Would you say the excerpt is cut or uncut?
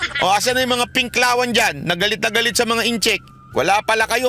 cut